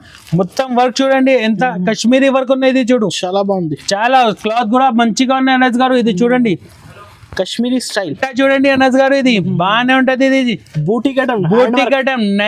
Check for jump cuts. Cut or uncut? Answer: cut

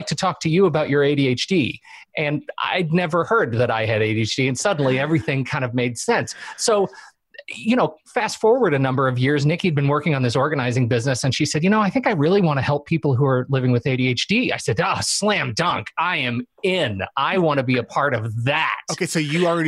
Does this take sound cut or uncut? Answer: uncut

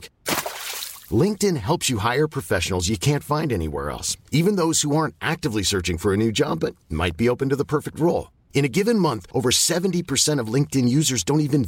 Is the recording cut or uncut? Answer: uncut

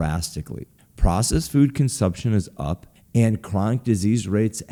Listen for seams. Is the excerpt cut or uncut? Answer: uncut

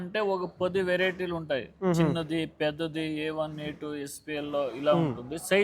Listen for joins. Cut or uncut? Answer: uncut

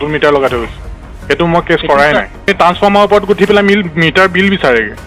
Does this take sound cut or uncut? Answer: cut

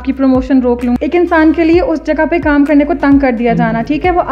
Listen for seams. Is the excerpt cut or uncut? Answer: cut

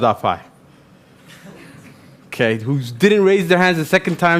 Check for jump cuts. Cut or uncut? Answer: uncut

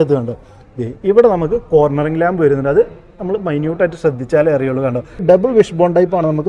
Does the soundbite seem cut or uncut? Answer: cut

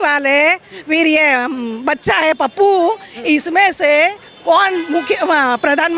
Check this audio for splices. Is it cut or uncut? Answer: uncut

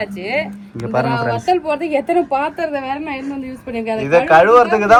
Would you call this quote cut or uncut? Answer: uncut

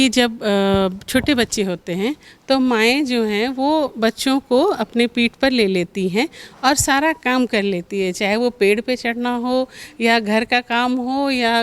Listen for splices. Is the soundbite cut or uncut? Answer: uncut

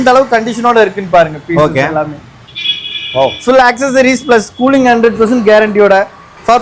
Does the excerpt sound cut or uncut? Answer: uncut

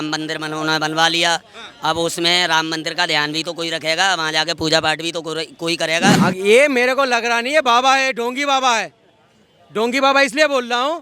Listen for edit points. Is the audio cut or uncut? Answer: cut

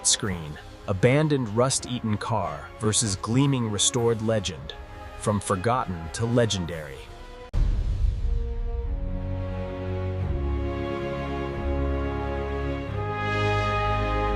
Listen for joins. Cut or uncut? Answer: uncut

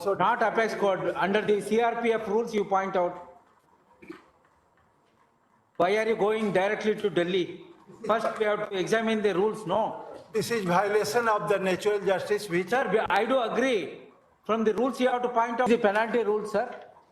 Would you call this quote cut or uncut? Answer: cut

